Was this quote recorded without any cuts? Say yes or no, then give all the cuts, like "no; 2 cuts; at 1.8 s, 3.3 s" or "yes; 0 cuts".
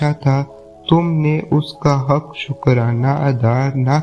yes; 0 cuts